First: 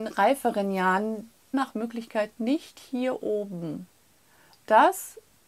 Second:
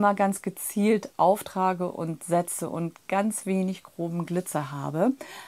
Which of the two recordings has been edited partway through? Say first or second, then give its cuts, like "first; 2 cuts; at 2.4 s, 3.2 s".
first; 1 cut; at 1.5 s